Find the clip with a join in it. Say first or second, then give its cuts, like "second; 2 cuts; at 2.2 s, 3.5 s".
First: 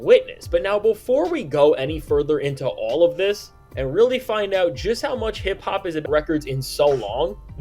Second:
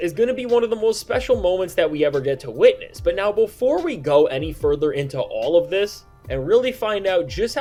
first; 1 cut; at 6.0 s